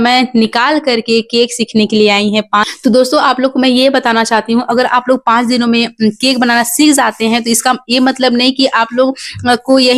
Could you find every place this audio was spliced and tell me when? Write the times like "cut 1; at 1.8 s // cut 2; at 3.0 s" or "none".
none